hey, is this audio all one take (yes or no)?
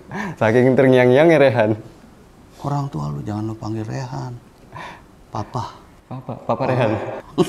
yes